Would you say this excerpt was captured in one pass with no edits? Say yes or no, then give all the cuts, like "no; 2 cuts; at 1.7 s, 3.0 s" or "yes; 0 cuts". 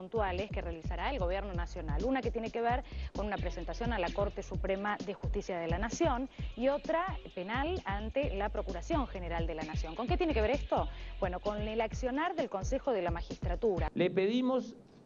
yes; 0 cuts